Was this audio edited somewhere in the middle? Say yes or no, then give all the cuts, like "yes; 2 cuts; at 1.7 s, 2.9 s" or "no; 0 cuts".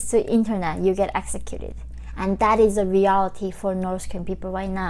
no; 0 cuts